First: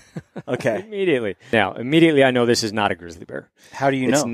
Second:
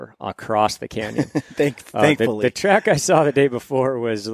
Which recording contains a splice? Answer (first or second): first